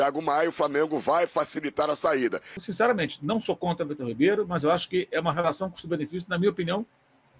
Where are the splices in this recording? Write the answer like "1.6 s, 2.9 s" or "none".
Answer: 2.6 s

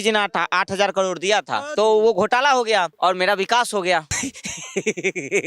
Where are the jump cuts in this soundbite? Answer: 1.7 s, 2.9 s, 4.1 s

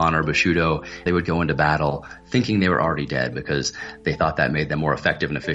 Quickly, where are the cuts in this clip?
1.0 s

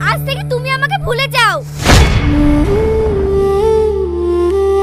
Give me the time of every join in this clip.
none

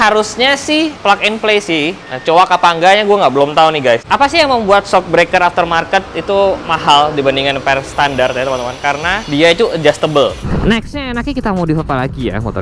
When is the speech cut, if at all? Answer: 1.0 s, 2.1 s, 4.0 s, 6.7 s, 9.2 s, 10.5 s

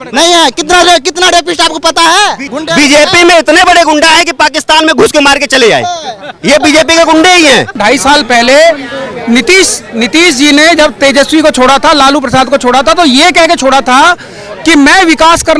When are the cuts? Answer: 2.4 s, 7.8 s

